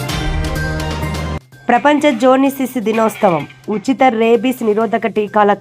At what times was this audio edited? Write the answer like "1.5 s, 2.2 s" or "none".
1.4 s